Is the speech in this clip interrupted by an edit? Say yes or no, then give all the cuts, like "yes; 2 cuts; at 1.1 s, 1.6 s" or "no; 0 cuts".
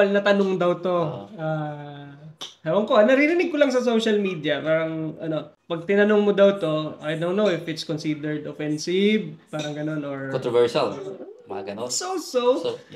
no; 0 cuts